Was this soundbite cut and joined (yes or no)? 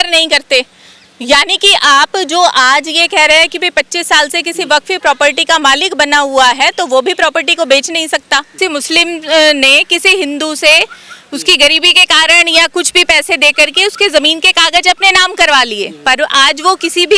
yes